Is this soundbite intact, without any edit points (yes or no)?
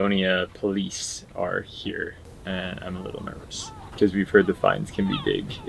no